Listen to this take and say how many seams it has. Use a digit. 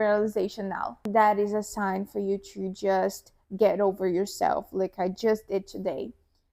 1